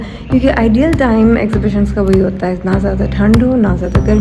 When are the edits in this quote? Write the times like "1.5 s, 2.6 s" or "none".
none